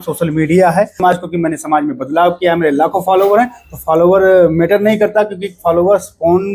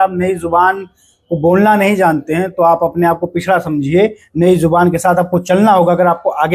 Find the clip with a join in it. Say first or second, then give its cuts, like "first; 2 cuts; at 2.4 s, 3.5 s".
first; 1 cut; at 1.1 s